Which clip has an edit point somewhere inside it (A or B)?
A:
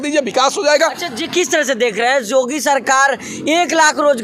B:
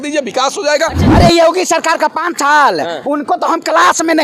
B